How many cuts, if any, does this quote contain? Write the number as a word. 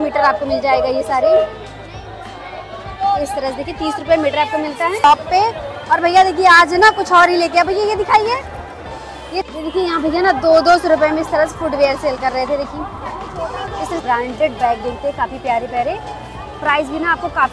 three